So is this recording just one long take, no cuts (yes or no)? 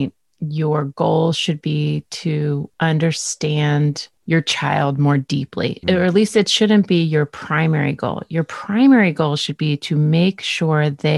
no